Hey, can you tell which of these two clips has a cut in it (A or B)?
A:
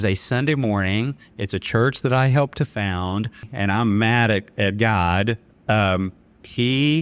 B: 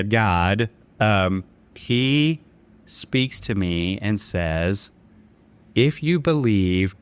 A